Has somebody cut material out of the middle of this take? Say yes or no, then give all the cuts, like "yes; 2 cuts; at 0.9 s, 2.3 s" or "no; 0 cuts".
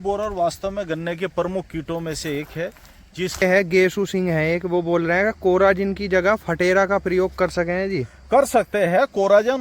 yes; 1 cut; at 3.4 s